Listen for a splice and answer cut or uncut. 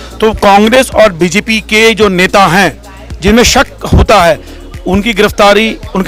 uncut